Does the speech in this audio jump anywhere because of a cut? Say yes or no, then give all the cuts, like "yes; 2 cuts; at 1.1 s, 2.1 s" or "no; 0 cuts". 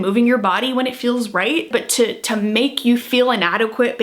yes; 1 cut; at 1.7 s